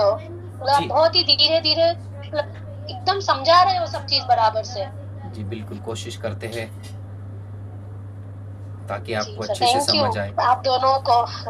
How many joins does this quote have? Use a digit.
0